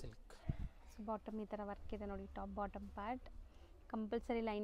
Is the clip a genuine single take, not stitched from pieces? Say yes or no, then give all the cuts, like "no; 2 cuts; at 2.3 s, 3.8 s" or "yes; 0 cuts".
yes; 0 cuts